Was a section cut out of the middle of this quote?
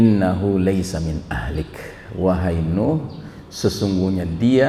no; 0 cuts

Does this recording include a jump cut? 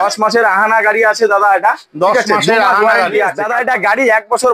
yes; 1 cut; at 3.4 s

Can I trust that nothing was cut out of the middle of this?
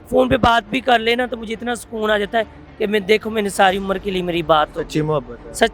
yes; 0 cuts

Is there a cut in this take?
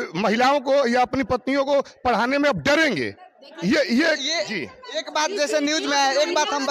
no; 0 cuts

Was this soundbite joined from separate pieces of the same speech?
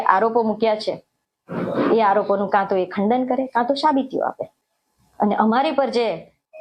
no; 0 cuts

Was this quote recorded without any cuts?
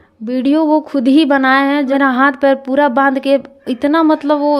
no; 1 cut; at 1.9 s

